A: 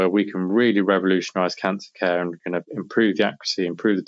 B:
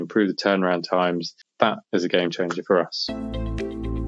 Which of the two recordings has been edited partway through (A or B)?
B